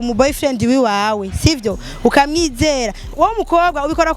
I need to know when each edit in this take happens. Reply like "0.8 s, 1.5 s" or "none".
3.1 s